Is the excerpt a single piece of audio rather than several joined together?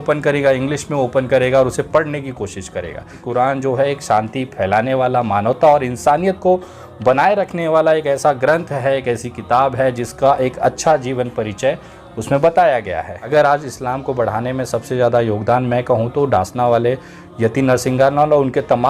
no; 2 cuts; at 3.2 s, 13.1 s

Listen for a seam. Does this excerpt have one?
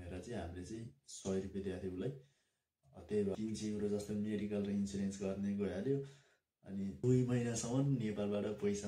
yes; 2 cuts; at 3.3 s, 7.0 s

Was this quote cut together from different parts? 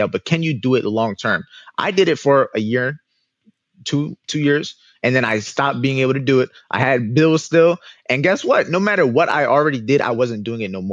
no; 0 cuts

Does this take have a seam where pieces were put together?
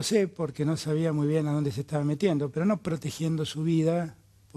no; 0 cuts

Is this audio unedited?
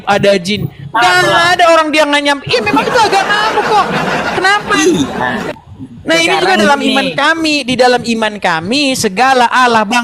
yes; 0 cuts

